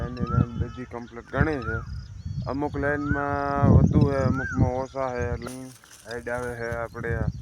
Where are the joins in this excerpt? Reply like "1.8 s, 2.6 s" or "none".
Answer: 5.5 s